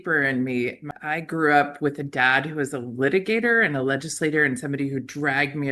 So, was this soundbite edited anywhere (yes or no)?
yes